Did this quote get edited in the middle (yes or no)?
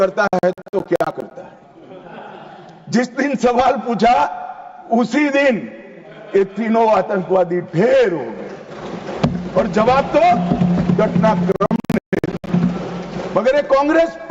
no